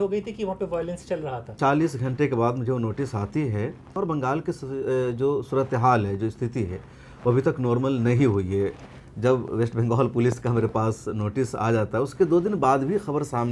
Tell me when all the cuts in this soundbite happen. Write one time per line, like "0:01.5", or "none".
0:01.5
0:03.9